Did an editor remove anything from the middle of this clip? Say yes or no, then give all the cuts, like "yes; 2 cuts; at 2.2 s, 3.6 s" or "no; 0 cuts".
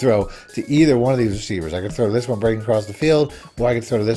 no; 0 cuts